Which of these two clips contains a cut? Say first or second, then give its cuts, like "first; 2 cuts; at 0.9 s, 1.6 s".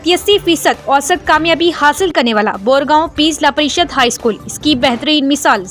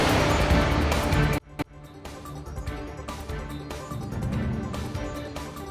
second; 1 cut; at 1.2 s